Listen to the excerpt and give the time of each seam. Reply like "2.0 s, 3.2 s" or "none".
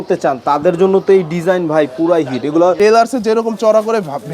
2.8 s